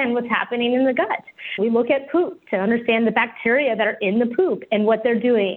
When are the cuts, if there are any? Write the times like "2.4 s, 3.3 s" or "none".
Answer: none